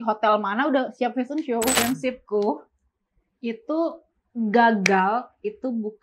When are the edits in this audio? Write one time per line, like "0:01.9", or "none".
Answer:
0:01.8